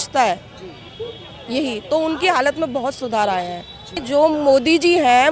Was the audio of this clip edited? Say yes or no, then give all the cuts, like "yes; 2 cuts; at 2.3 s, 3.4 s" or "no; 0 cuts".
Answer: yes; 1 cut; at 3.9 s